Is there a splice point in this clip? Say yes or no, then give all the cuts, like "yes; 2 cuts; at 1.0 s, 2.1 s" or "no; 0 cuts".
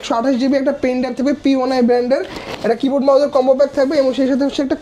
no; 0 cuts